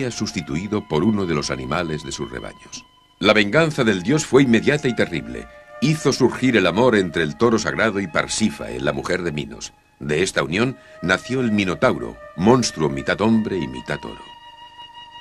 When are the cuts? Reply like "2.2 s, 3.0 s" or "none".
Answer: none